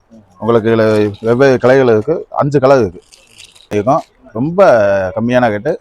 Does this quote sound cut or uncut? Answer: cut